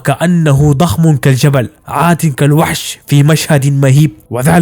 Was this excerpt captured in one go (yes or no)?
yes